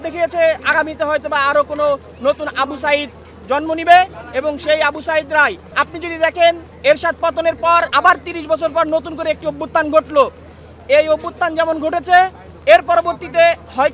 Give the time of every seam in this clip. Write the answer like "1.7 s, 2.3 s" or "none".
5.6 s, 7.9 s